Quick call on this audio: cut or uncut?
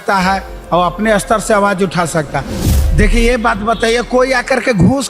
cut